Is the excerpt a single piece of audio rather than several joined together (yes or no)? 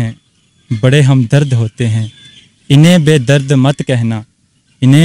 yes